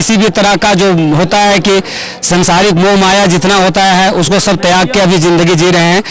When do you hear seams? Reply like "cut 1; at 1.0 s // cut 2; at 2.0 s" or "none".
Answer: none

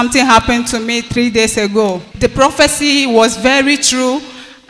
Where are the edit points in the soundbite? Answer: cut 1; at 2.1 s

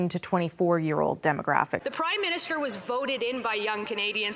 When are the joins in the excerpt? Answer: cut 1; at 1.8 s

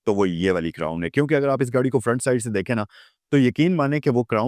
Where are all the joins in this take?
none

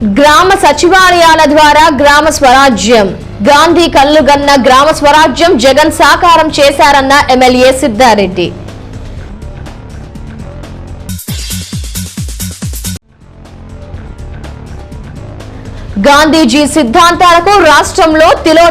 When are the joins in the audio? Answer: cut 1; at 15.9 s

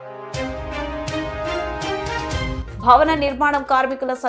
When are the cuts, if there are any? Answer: cut 1; at 2.6 s

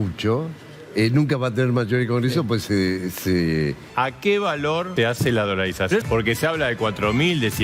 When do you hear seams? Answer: cut 1; at 3.8 s // cut 2; at 4.9 s // cut 3; at 6.0 s

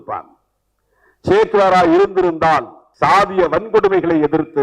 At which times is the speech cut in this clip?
cut 1; at 2.8 s

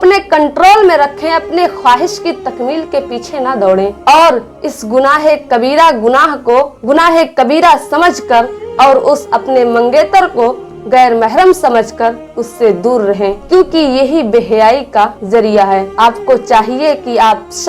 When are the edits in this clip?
none

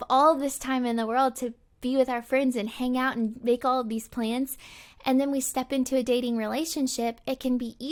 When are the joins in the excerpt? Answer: none

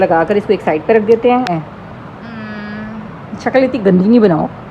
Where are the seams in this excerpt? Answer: cut 1; at 1.5 s

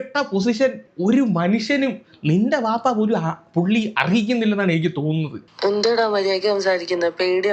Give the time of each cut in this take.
cut 1; at 5.4 s

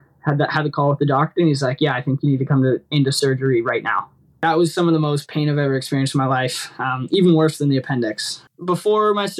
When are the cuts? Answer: cut 1; at 4.3 s // cut 2; at 8.4 s

